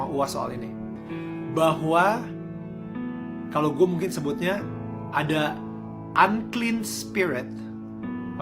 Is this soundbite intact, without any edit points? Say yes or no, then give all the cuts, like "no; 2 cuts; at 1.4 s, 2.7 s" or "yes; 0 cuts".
yes; 0 cuts